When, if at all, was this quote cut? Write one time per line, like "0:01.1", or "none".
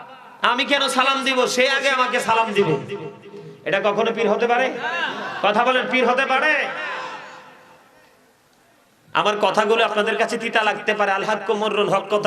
none